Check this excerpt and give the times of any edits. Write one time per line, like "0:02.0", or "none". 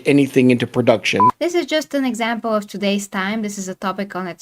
0:01.3